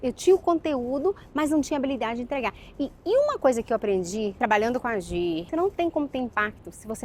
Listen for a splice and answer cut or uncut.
cut